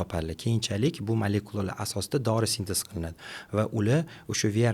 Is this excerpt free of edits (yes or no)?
yes